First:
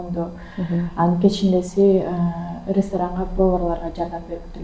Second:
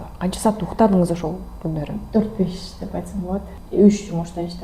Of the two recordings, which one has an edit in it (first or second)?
second